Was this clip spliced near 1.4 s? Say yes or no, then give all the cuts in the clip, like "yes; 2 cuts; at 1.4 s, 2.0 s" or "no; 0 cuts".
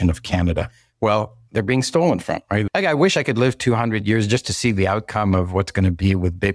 yes; 2 cuts; at 1.4 s, 2.6 s